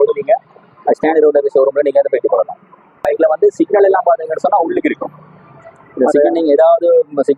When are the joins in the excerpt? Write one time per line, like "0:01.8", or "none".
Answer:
0:03.0